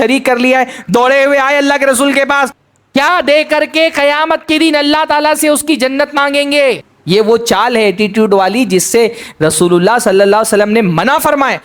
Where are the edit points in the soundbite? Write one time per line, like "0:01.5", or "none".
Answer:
0:02.6
0:06.9